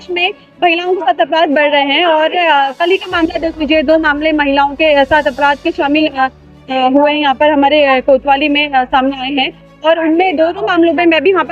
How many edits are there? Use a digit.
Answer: 0